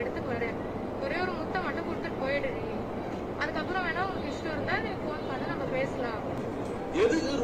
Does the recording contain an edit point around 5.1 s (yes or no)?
no